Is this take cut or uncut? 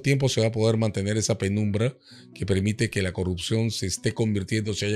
uncut